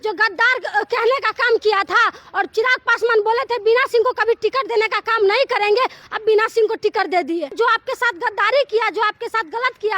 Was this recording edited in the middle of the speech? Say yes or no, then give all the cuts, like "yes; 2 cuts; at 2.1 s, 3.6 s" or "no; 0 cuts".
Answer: yes; 2 cuts; at 6.0 s, 7.5 s